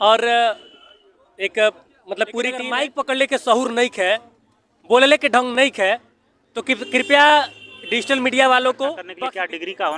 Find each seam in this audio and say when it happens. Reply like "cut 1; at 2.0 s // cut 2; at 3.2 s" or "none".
cut 1; at 2.7 s // cut 2; at 9.1 s